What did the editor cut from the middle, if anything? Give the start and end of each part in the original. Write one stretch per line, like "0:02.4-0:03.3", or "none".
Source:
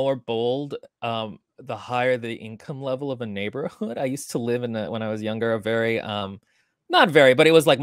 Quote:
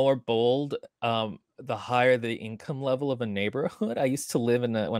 none